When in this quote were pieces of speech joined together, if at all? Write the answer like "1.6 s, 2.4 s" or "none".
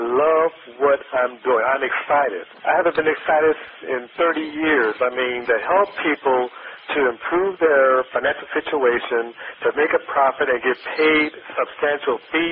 2.5 s, 3.8 s, 5.4 s